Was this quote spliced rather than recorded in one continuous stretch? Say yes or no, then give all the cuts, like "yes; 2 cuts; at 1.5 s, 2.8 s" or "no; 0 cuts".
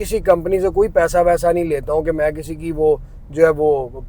no; 0 cuts